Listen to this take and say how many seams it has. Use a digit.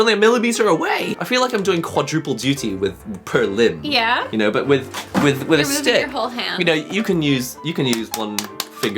1